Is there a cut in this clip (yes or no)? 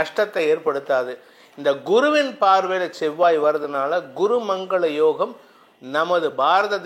no